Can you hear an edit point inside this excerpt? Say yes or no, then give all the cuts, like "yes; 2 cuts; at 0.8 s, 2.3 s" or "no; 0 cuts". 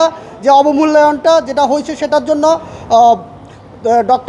no; 0 cuts